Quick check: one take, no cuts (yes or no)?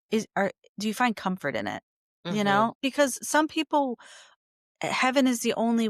no